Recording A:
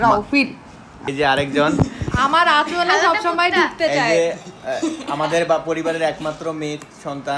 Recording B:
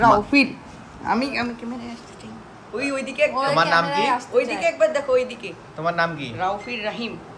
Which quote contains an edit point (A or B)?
A